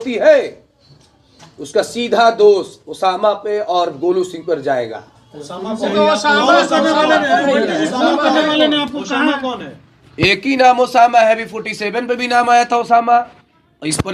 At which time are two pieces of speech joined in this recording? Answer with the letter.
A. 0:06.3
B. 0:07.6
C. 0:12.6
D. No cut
D